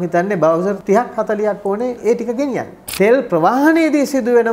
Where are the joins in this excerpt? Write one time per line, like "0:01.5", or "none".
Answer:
0:00.8
0:02.0
0:02.8